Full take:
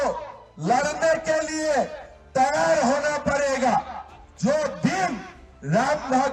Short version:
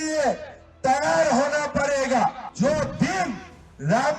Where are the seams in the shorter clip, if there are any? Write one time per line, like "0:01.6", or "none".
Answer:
0:02.4